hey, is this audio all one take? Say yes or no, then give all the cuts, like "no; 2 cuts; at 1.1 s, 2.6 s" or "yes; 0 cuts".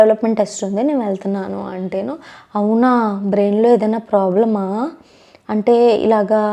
yes; 0 cuts